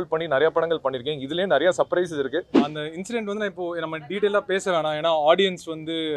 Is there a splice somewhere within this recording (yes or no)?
yes